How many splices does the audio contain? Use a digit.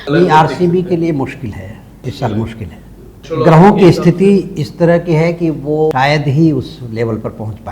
3